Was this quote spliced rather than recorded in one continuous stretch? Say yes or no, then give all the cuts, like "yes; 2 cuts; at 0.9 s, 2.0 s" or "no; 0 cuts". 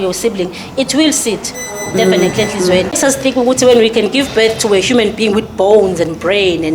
yes; 1 cut; at 3.0 s